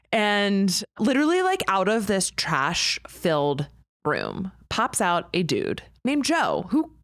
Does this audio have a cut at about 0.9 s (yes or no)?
yes